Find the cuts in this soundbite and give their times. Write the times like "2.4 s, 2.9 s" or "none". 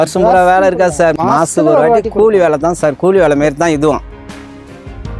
1.2 s, 4.0 s